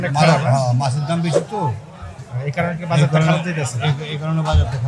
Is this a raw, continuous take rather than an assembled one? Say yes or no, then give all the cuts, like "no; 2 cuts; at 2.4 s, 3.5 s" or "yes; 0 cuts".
yes; 0 cuts